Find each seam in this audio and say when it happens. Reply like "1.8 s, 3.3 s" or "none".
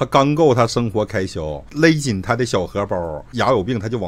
1.6 s, 3.3 s